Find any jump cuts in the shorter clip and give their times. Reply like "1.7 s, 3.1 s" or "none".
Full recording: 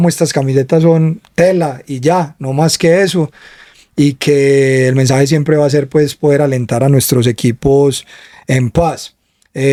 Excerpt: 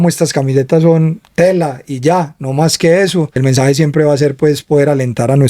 3.4 s